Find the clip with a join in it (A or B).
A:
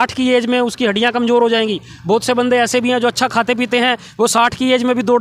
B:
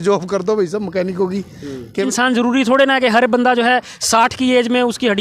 B